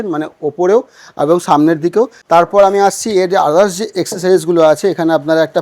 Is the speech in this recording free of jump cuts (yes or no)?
no